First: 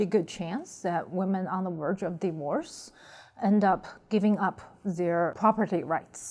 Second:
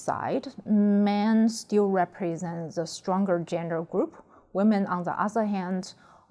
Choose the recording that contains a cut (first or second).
first